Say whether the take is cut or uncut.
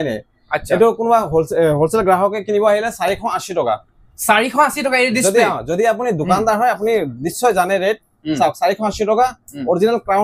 uncut